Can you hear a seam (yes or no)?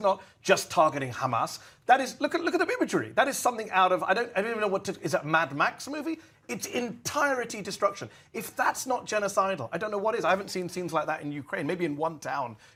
no